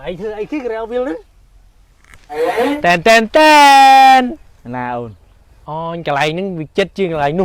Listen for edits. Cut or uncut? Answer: cut